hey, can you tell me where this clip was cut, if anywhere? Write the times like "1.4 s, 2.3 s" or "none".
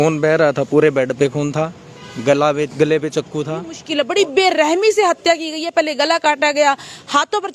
3.8 s